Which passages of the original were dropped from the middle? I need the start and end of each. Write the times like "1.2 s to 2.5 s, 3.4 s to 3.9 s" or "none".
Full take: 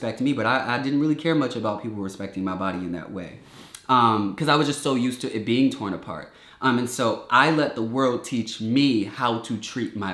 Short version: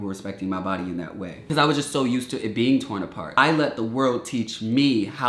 3.4 s to 4.4 s, 6.3 s to 7.3 s